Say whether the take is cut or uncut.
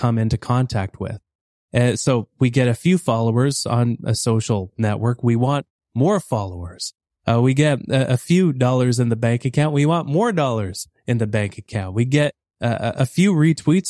uncut